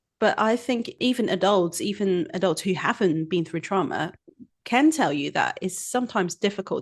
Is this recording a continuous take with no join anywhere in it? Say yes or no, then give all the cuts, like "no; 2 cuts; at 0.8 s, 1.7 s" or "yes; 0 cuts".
no; 1 cut; at 0.9 s